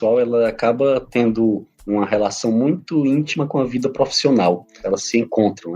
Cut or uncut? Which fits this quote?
cut